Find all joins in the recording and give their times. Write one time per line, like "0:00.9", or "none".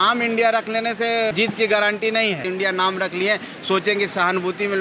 0:01.3
0:02.4

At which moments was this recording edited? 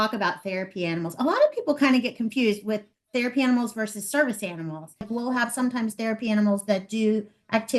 0:05.1

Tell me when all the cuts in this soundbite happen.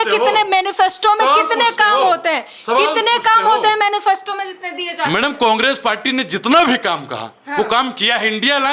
none

